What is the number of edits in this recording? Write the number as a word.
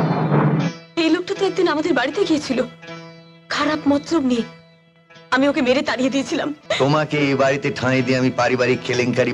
one